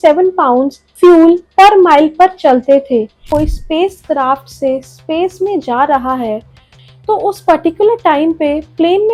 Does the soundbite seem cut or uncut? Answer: cut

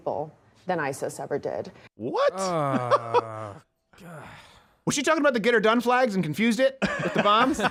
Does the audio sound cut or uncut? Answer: uncut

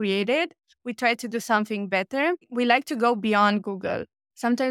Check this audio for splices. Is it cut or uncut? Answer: cut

